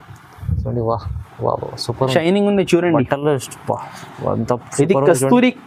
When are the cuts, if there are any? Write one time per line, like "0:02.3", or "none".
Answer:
0:02.1